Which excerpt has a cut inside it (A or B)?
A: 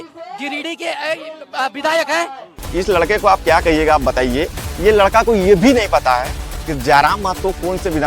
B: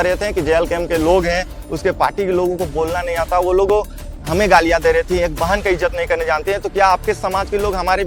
A